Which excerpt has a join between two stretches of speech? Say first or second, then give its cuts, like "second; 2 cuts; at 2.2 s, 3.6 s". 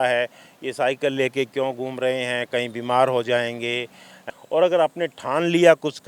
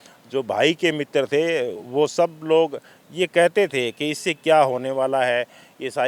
first; 1 cut; at 4.2 s